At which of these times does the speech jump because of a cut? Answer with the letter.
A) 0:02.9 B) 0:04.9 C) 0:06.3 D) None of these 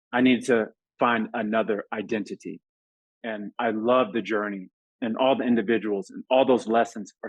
A